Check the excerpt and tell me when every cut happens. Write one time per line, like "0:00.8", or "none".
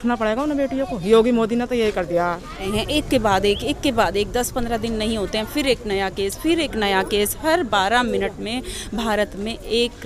0:02.7

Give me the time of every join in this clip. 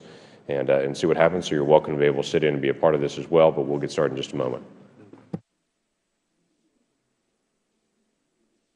0:03.2

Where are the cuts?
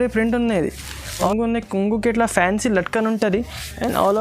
0:01.3

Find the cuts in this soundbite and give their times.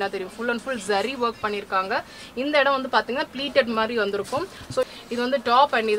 0:04.9

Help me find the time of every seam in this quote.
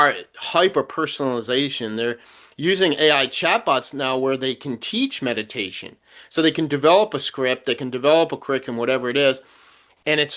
none

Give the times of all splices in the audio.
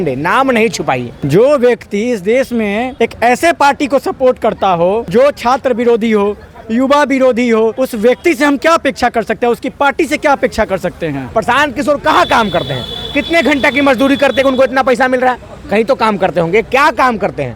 0:01.1
0:02.9
0:05.0
0:07.7
0:11.2

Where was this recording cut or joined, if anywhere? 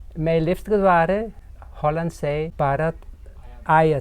0:02.5

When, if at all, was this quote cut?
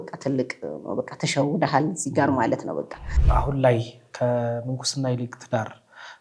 0:03.1

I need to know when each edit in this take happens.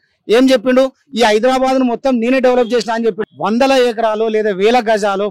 0:03.3

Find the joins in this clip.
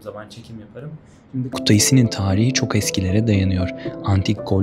0:01.6

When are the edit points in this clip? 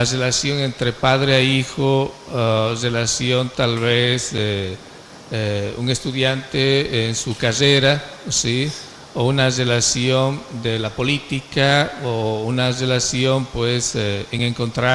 none

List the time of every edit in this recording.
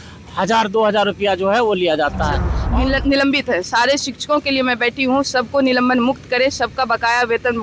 0:02.5

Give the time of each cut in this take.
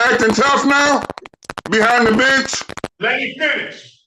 0:02.9

